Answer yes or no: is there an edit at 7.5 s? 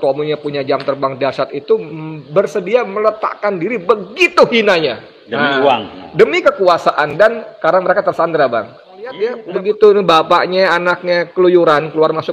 no